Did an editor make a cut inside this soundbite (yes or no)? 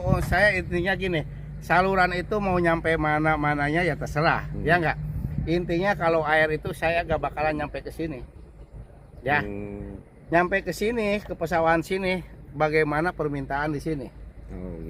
no